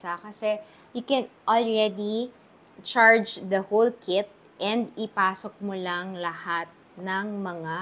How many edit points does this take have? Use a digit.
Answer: 0